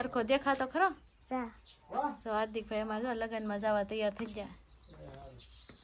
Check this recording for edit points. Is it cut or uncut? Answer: uncut